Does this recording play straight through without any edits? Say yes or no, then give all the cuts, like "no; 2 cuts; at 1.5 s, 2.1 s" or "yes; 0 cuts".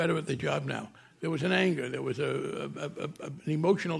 yes; 0 cuts